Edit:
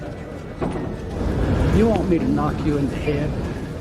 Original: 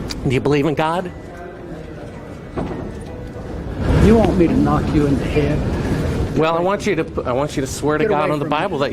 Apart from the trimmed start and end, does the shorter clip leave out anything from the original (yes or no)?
yes